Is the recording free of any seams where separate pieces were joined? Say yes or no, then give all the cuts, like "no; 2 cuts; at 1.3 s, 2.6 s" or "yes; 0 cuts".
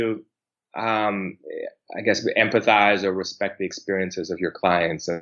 yes; 0 cuts